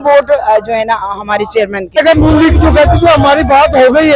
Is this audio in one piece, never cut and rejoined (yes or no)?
no